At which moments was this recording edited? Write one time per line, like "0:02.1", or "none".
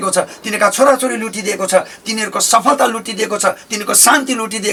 none